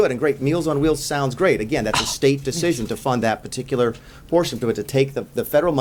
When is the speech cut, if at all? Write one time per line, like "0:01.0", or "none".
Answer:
none